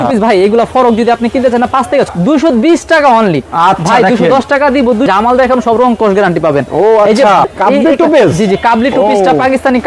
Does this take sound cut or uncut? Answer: cut